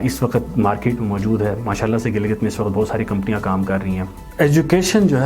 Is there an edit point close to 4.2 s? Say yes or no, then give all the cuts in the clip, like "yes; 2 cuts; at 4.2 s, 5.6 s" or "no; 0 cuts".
yes; 1 cut; at 4.2 s